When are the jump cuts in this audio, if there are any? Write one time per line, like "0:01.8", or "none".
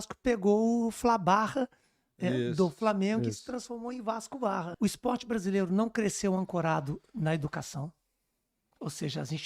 0:04.7

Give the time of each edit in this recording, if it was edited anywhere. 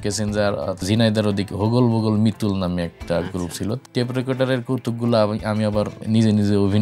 0:00.8
0:03.8
0:06.0

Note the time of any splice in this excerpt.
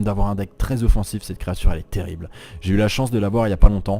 0:01.1

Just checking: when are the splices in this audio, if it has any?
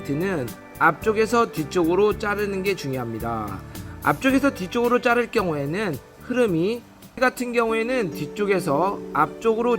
0:07.2

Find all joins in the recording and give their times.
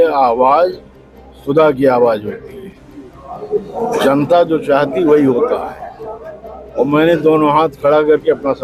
none

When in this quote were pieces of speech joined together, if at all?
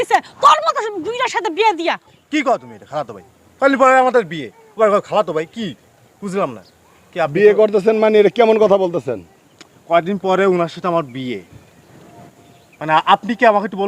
0:02.1

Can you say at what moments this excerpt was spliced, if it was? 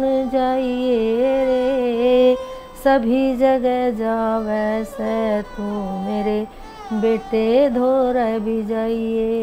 none

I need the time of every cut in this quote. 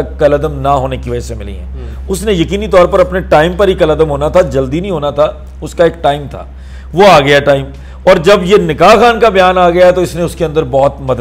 none

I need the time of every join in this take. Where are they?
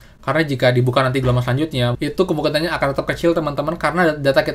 0:02.0

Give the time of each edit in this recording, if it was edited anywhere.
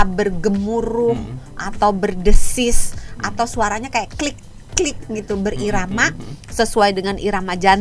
none

